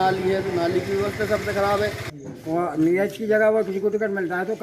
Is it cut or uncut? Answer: cut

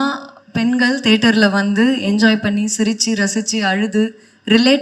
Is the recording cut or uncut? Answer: uncut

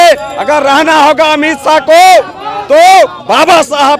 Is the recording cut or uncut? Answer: uncut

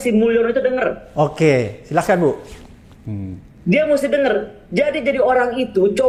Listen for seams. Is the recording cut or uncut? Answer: uncut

